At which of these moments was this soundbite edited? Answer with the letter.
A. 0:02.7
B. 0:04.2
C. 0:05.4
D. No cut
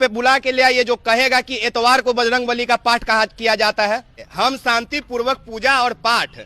B